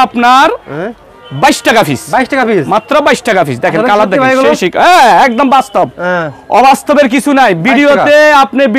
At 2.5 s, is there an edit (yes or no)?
no